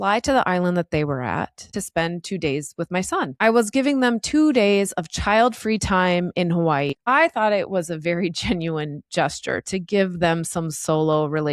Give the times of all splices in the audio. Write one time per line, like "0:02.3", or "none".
0:01.7
0:03.3
0:06.9